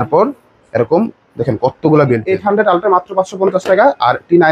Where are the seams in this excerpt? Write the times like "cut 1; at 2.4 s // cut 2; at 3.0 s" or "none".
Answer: cut 1; at 2.2 s